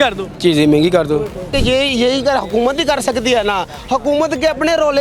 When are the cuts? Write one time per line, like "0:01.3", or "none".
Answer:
0:01.5